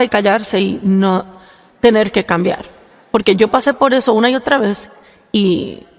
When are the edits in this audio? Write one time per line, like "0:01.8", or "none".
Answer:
none